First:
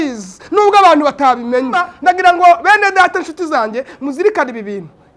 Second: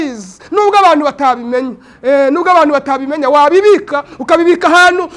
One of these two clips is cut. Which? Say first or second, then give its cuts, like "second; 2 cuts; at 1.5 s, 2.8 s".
first; 1 cut; at 1.9 s